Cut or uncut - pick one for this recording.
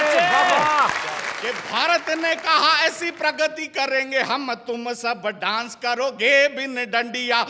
cut